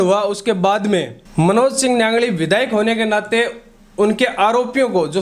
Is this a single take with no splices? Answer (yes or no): no